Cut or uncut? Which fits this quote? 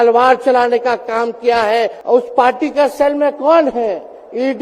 cut